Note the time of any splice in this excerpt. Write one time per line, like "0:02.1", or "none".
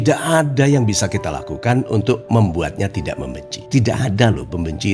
none

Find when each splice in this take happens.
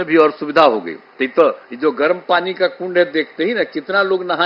0:01.0

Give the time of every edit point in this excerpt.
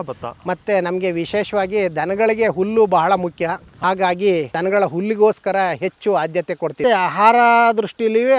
0:03.7
0:04.5
0:06.8

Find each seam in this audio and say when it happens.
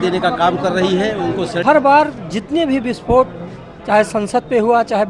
0:01.6

